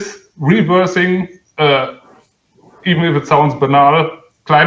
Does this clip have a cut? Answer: no; 0 cuts

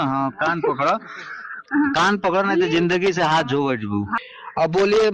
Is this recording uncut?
no; 1 cut; at 4.1 s

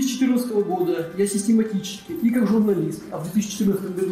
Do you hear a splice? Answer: no; 0 cuts

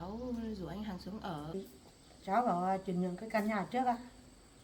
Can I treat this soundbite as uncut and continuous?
no; 1 cut; at 1.5 s

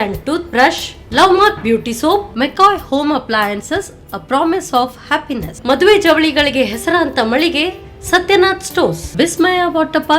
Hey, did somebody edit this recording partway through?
no; 0 cuts

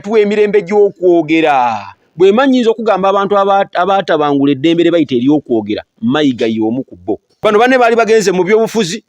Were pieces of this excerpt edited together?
yes; 1 cut; at 7.3 s

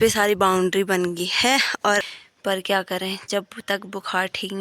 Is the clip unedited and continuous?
no; 1 cut; at 2.0 s

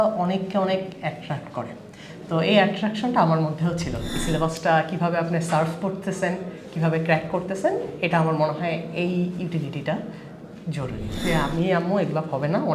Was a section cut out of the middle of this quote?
yes; 2 cuts; at 4.1 s, 11.2 s

